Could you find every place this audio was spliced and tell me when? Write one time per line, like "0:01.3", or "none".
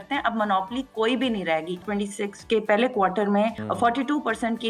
0:01.8
0:03.6